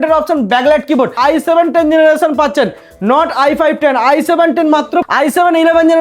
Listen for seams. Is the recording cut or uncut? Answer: cut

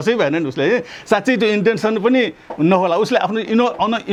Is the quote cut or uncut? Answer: uncut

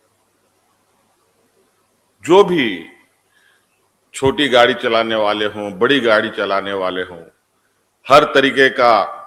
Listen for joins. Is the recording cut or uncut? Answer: uncut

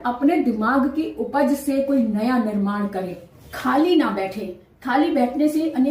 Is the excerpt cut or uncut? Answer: uncut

